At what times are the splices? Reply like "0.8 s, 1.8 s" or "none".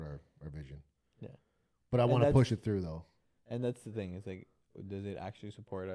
none